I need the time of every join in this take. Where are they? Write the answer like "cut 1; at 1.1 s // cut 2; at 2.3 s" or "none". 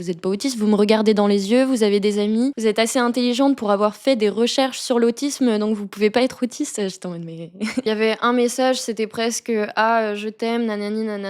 cut 1; at 2.6 s // cut 2; at 7.9 s